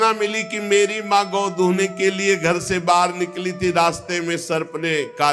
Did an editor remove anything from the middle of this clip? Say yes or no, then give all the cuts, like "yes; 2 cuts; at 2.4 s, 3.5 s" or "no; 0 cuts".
no; 0 cuts